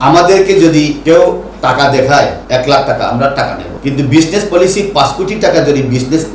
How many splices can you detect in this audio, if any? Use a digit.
3